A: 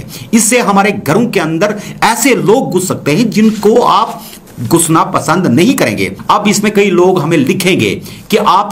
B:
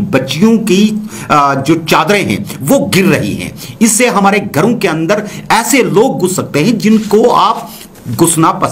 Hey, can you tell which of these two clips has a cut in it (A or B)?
A